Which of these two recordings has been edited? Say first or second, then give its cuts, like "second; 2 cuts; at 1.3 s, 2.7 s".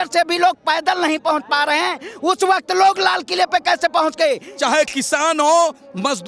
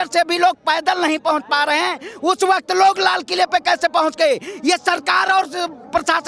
first; 1 cut; at 4.5 s